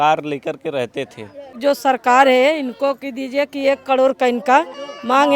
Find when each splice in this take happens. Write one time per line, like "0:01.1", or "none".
0:01.6